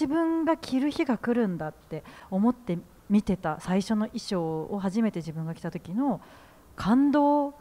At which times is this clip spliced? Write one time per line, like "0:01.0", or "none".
none